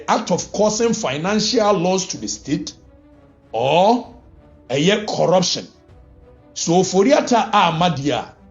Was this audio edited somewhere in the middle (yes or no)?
no